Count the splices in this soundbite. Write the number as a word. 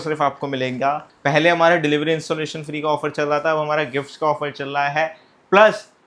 one